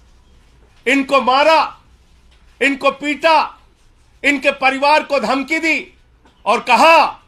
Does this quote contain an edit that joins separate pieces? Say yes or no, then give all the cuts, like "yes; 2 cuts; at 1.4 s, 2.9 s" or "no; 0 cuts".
no; 0 cuts